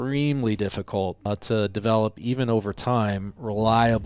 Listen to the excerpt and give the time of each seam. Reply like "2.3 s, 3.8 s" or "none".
1.2 s